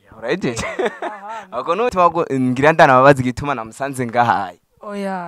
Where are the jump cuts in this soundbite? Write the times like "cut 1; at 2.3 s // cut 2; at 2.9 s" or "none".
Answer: cut 1; at 1.9 s